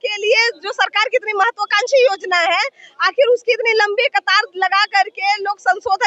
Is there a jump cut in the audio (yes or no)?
no